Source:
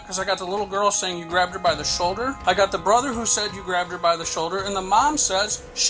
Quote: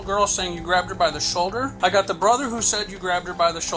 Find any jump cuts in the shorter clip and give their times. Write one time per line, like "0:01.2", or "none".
none